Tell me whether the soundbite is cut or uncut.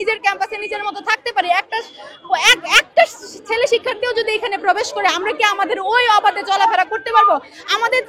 uncut